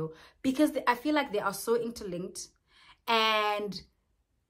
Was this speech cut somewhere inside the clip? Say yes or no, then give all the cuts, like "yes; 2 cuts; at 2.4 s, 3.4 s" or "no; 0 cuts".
no; 0 cuts